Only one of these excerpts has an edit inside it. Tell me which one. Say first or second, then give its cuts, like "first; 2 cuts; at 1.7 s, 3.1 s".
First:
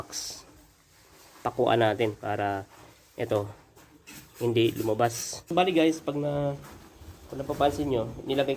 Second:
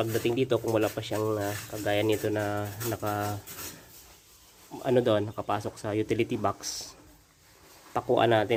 first; 1 cut; at 5.4 s